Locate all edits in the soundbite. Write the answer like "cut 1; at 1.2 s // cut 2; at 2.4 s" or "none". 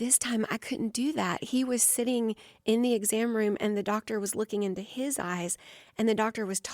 none